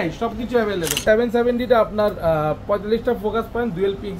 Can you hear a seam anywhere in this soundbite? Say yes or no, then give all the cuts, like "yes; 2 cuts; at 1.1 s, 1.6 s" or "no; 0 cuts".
yes; 1 cut; at 0.9 s